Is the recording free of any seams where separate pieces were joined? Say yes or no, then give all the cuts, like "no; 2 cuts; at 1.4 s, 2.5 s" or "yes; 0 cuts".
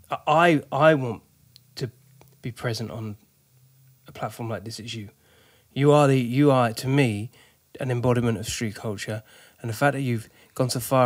yes; 0 cuts